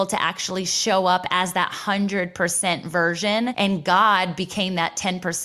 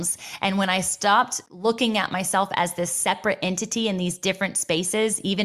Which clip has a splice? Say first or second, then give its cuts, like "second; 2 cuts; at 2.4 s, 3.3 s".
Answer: first; 1 cut; at 3.5 s